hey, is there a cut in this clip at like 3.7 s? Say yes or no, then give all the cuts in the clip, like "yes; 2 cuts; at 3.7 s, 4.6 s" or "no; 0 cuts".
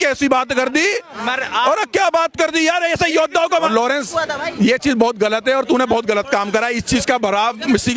yes; 1 cut; at 3.7 s